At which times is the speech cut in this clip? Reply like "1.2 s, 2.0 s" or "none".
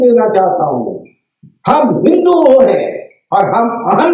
none